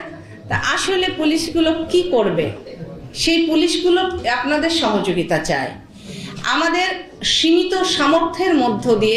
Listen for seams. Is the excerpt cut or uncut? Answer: uncut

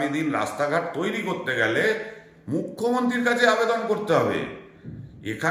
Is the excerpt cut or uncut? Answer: uncut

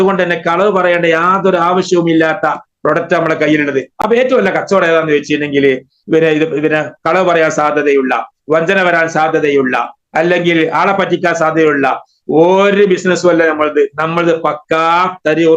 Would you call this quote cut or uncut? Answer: uncut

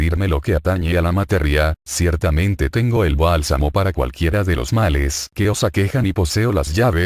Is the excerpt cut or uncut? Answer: cut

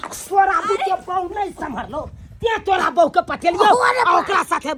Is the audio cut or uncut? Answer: uncut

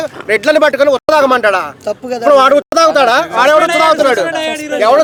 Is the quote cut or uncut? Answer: uncut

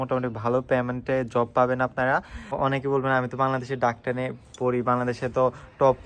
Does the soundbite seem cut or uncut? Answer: cut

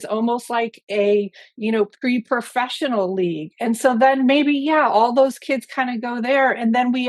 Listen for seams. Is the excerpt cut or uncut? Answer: uncut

